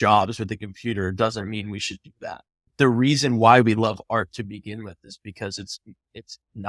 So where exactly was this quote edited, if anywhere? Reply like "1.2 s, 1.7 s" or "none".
2.7 s